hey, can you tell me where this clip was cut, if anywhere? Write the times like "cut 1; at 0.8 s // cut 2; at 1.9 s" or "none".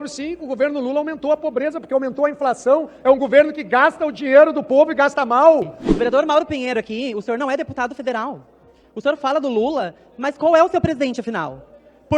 cut 1; at 5.8 s